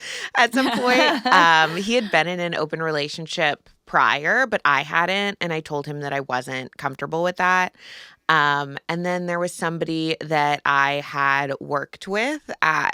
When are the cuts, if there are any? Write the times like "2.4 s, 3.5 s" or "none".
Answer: none

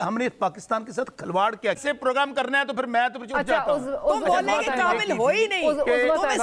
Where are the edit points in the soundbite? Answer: 1.8 s

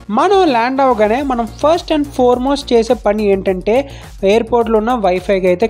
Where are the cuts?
none

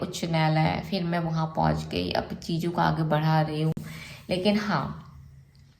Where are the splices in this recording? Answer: none

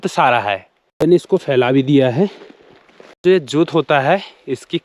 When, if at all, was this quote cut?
1.1 s, 3.2 s

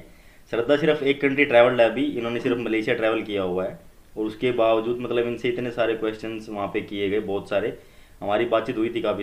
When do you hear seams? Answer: none

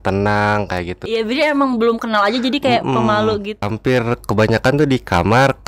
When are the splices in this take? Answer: 1.1 s, 3.5 s

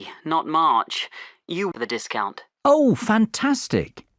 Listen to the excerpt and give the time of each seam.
1.7 s

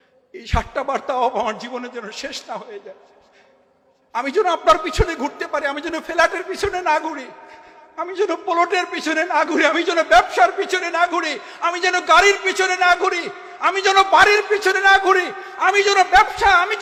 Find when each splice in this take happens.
none

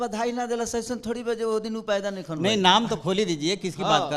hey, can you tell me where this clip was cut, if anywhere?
none

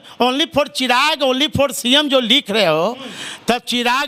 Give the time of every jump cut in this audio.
none

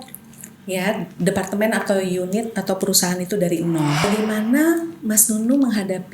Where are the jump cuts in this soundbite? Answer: 4.0 s

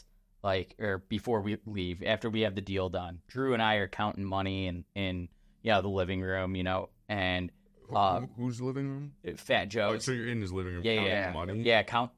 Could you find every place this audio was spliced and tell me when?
none

